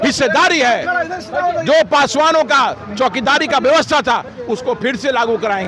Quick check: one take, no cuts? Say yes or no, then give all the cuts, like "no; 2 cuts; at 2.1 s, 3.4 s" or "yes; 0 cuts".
yes; 0 cuts